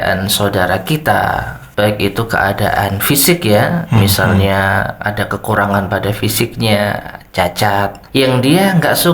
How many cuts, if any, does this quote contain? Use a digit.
2